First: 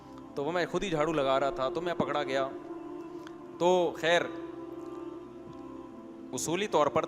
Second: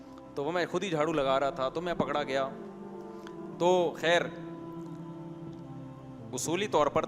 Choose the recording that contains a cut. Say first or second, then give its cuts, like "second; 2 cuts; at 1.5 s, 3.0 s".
second; 2 cuts; at 4.7 s, 6.3 s